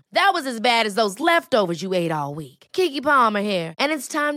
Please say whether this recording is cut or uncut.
uncut